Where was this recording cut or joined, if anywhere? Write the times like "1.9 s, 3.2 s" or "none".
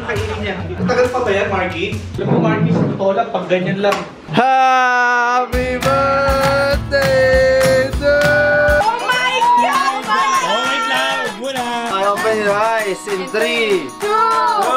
2.1 s, 8.8 s